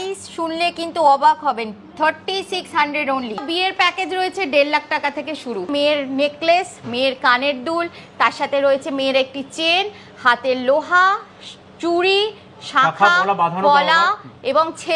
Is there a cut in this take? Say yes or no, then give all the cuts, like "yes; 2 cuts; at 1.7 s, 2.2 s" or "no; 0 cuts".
yes; 2 cuts; at 3.4 s, 5.7 s